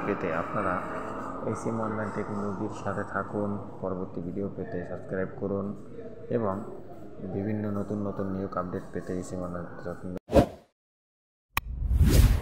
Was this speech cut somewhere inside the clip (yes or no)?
yes